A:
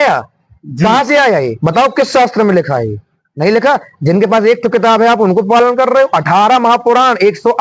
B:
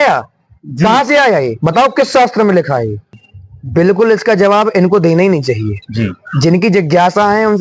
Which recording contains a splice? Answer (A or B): B